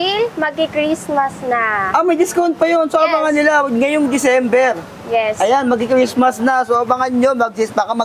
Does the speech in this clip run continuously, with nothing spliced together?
yes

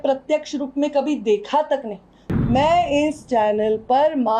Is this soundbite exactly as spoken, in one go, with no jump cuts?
no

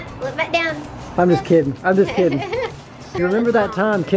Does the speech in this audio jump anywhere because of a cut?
yes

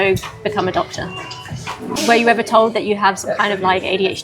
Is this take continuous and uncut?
no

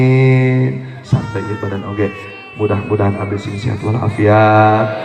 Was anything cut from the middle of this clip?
yes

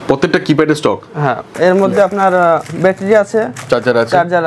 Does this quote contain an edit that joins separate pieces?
yes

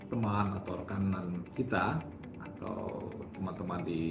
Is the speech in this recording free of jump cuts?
yes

